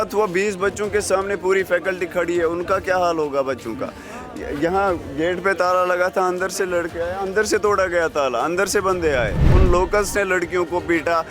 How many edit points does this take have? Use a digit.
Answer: 1